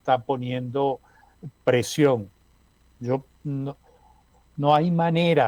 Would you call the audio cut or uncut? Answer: uncut